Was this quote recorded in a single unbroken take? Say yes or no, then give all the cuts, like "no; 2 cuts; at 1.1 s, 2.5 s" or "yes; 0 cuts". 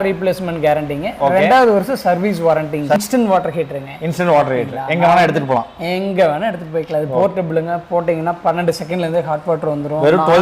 no; 1 cut; at 3.0 s